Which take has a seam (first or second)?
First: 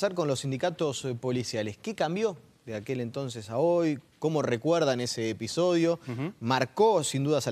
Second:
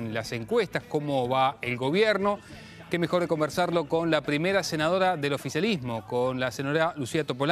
second